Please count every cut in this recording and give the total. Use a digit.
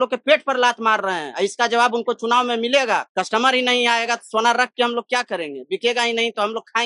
1